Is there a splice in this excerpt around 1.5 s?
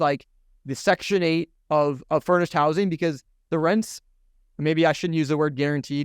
yes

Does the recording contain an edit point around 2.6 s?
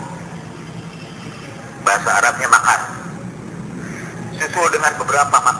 yes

